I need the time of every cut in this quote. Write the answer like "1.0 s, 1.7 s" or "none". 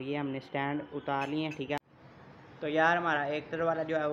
1.8 s